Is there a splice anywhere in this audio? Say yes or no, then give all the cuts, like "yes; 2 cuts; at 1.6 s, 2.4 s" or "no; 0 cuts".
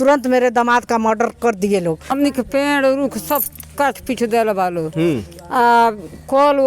yes; 1 cut; at 2.1 s